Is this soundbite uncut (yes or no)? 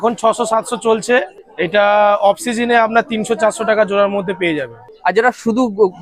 no